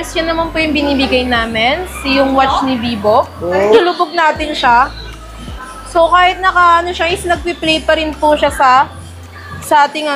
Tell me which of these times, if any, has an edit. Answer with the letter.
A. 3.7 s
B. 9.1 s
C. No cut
A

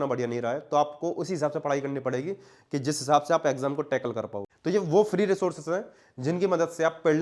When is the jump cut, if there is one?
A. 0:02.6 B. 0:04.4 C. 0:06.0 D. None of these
B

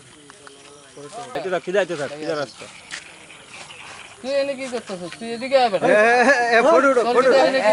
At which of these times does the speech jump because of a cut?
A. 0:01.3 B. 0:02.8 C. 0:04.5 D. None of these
A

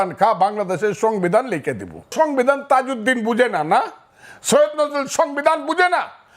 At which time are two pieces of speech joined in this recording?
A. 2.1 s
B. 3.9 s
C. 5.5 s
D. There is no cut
A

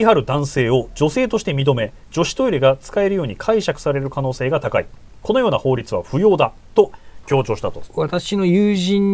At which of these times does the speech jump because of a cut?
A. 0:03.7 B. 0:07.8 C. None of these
B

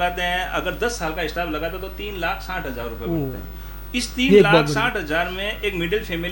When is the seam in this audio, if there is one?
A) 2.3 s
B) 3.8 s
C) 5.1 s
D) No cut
D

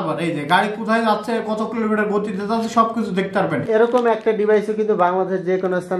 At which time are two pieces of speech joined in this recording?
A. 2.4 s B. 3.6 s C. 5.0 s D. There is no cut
B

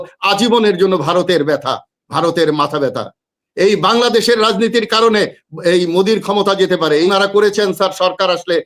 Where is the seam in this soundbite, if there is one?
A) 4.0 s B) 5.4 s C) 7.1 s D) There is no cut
C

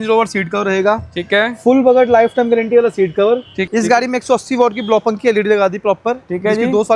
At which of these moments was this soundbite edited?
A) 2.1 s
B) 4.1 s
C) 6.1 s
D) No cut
B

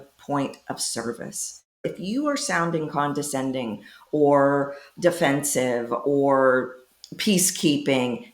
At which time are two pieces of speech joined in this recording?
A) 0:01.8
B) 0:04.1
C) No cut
A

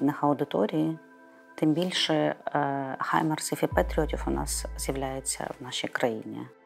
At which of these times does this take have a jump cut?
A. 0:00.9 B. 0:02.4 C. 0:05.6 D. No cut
D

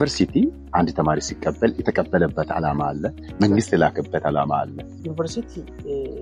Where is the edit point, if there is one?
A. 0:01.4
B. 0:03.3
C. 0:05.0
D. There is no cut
C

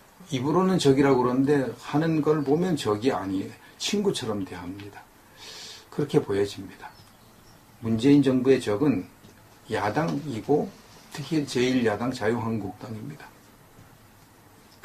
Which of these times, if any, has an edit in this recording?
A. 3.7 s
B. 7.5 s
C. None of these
C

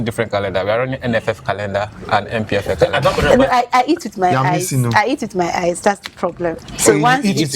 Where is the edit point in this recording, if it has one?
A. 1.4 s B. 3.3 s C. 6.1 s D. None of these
B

